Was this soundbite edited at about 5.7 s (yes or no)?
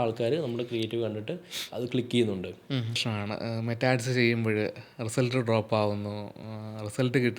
no